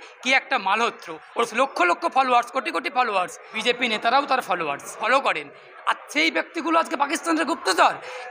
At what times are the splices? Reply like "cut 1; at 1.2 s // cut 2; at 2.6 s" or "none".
cut 1; at 1.5 s // cut 2; at 3.4 s // cut 3; at 5.0 s